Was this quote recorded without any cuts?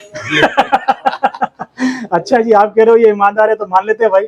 yes; 0 cuts

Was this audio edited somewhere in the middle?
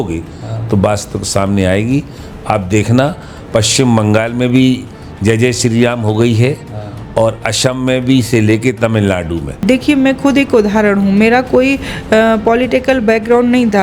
yes; 1 cut; at 9.6 s

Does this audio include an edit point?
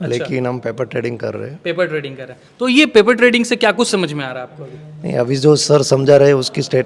no; 0 cuts

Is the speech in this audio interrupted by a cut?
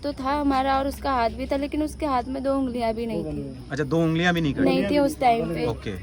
no; 0 cuts

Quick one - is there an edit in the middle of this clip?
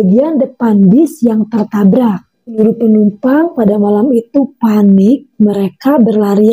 yes; 1 cut; at 2.4 s

